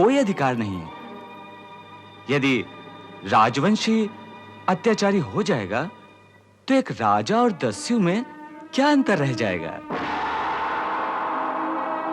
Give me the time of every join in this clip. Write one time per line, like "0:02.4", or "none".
none